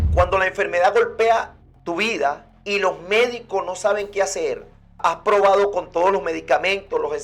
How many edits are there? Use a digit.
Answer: 1